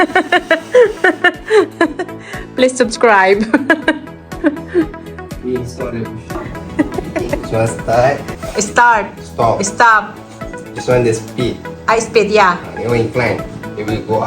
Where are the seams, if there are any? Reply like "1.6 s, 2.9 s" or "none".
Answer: 7.4 s